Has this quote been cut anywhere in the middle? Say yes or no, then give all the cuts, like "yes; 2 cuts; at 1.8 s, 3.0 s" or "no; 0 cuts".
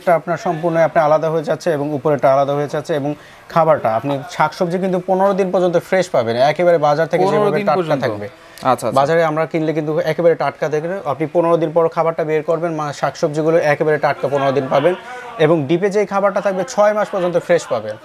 no; 0 cuts